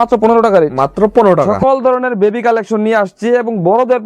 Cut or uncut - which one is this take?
cut